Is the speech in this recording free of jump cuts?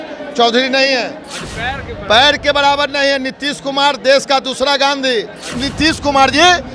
no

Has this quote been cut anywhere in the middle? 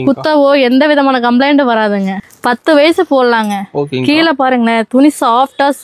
yes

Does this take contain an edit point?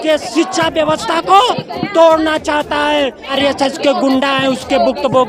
yes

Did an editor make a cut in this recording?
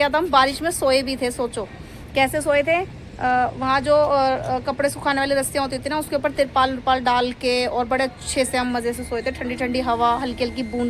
no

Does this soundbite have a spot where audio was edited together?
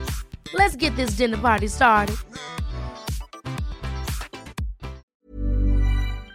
yes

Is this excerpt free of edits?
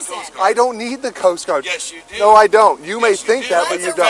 yes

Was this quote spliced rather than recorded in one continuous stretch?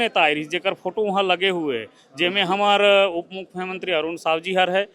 no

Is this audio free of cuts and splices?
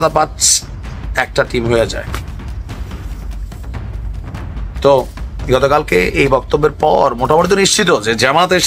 yes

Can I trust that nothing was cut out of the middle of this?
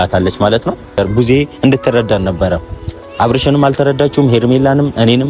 no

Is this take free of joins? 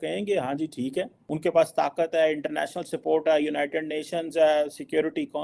no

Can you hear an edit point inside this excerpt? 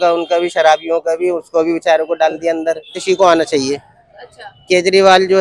yes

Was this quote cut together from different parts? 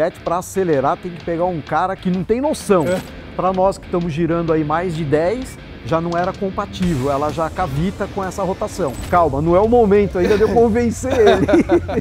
yes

